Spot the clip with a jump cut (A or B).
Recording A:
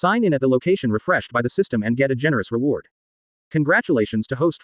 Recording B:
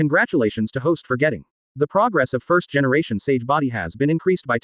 B